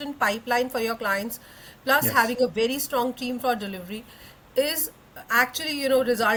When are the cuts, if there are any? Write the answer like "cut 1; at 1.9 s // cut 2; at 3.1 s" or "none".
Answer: none